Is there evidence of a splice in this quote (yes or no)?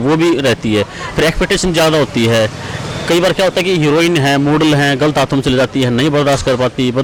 no